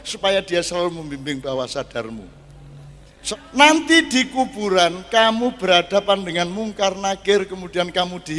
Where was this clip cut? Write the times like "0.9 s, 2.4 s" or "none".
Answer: 3.2 s